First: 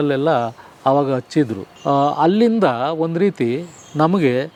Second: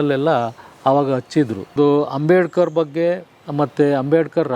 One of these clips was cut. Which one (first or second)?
second